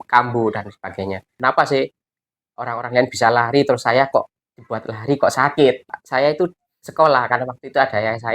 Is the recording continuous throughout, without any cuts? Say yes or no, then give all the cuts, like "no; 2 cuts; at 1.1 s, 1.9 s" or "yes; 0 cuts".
no; 2 cuts; at 1.4 s, 6.0 s